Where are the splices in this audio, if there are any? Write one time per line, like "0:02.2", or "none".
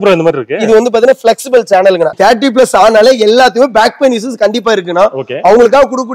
0:02.1